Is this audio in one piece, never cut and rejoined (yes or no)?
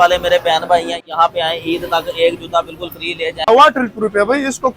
no